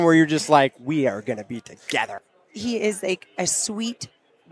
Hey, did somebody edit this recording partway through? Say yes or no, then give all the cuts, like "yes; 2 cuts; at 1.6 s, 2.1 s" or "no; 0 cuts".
yes; 1 cut; at 2.1 s